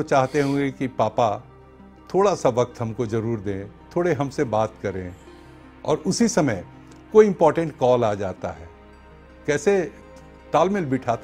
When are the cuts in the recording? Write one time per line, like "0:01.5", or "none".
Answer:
none